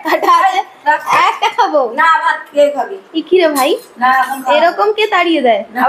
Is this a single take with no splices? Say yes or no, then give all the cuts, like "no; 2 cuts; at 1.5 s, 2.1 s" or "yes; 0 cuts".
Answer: yes; 0 cuts